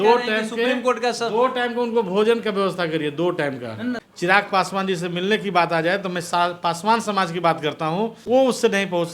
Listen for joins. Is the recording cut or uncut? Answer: cut